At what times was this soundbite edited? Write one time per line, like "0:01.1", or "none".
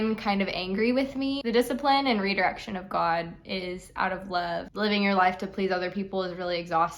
0:01.4
0:04.7

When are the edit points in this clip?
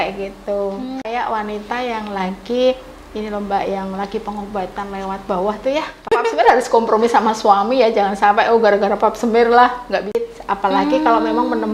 0:01.1
0:06.1
0:10.2

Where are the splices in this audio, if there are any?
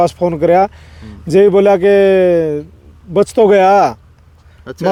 none

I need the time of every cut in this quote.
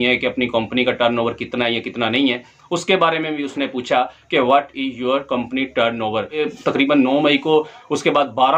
0:06.3

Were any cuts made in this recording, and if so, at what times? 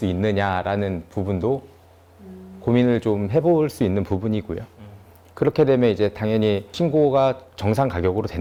none

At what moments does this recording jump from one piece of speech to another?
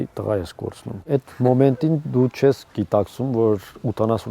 0:00.9

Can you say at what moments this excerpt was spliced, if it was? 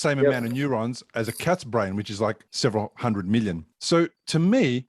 0:02.5
0:03.7

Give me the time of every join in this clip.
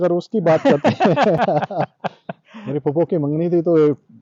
none

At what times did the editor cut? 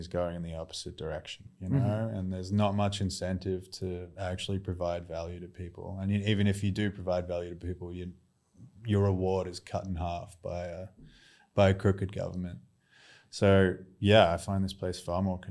0:01.5

